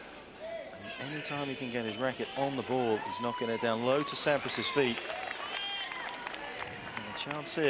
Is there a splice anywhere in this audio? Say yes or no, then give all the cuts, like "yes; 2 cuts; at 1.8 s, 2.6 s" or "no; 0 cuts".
yes; 1 cut; at 3.5 s